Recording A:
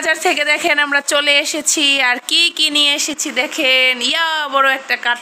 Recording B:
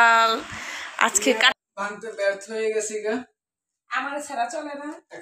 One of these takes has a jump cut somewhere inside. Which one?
B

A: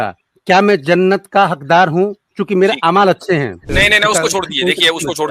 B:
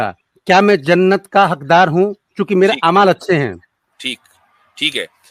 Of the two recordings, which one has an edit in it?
A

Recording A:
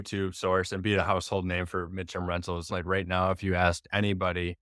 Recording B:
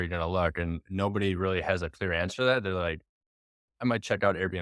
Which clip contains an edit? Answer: A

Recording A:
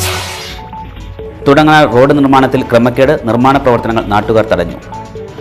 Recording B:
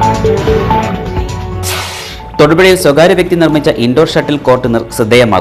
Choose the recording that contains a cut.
B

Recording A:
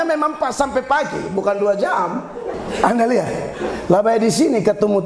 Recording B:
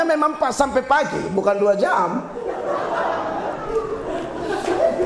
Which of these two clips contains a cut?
A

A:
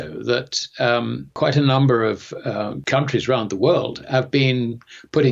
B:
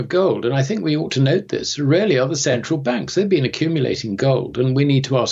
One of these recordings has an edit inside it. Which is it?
A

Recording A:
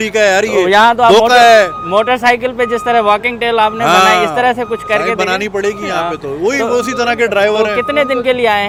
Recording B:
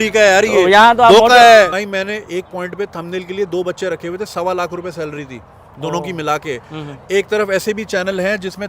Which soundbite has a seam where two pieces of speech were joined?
B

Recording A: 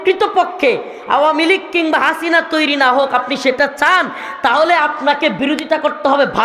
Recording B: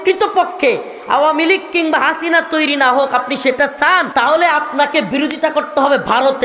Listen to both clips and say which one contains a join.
B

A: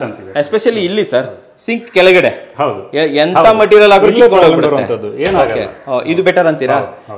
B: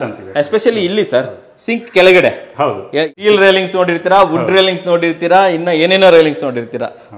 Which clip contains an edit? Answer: B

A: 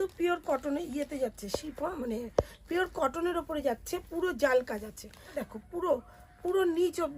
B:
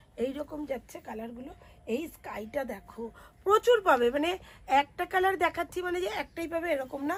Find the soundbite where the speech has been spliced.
A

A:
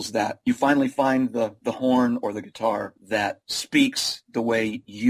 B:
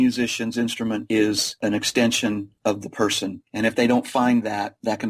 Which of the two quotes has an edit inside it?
B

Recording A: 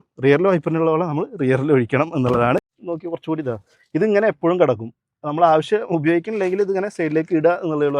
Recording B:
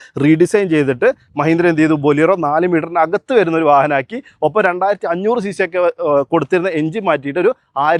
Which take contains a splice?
A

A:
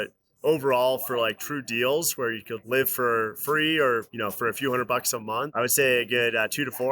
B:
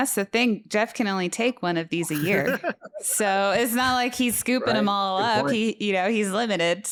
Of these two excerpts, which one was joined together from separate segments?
A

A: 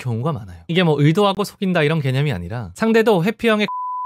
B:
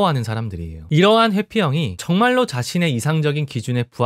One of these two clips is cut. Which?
A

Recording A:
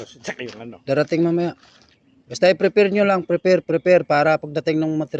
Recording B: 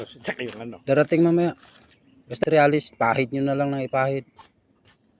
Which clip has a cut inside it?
B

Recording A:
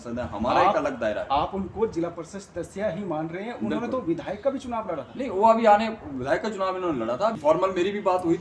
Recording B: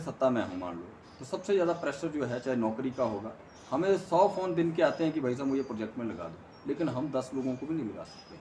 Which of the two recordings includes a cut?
A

